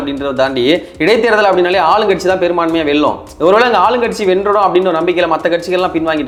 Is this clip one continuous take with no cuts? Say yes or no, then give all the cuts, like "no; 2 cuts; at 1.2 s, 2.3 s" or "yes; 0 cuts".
yes; 0 cuts